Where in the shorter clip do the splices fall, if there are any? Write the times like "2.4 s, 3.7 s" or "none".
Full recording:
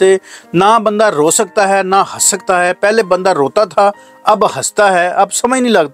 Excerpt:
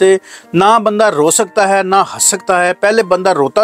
none